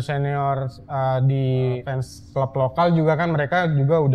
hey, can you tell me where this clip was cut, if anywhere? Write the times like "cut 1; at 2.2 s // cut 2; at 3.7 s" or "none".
cut 1; at 1.8 s